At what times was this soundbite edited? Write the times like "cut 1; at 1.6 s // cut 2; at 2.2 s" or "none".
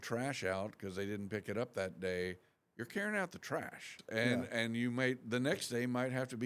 cut 1; at 4.0 s